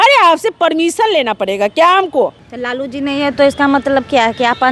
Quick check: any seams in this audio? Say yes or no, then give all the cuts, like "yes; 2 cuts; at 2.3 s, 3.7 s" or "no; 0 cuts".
yes; 1 cut; at 2.4 s